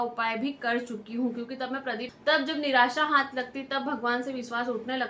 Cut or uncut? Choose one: cut